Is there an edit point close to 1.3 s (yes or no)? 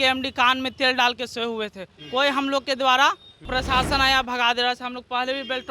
no